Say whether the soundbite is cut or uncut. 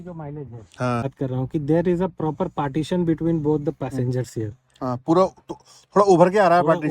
cut